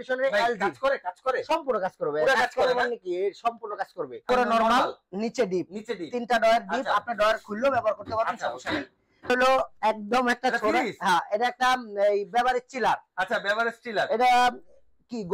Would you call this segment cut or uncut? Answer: cut